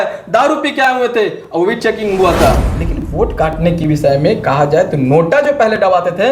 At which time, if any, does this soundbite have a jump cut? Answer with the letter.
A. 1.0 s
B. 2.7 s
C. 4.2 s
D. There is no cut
B